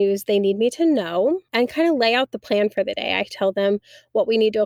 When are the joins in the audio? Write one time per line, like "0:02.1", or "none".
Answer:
0:01.5